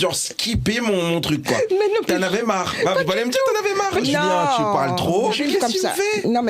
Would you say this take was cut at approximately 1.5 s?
no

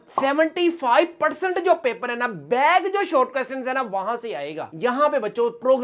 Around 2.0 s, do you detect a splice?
no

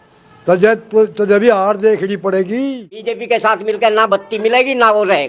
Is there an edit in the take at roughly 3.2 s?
yes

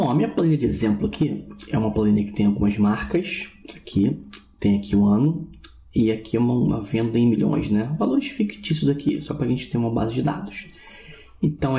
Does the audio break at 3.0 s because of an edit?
no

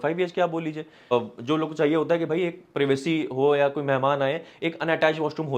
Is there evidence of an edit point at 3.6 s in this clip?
no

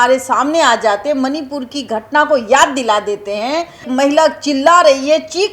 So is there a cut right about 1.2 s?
no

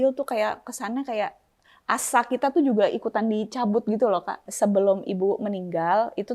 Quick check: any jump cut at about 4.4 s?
yes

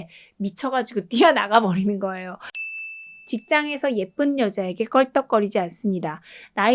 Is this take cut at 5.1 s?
no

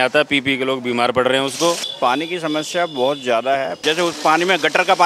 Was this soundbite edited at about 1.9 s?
yes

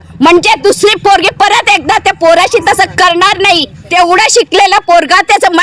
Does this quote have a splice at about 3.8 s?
yes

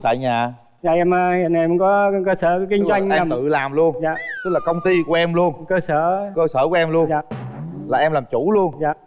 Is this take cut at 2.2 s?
no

